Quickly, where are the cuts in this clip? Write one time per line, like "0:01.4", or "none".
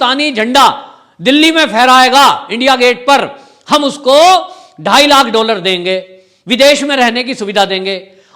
none